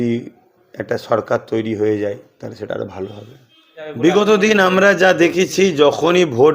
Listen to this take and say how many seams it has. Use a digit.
1